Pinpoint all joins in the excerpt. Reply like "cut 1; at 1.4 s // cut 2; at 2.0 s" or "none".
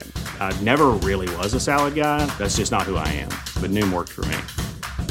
none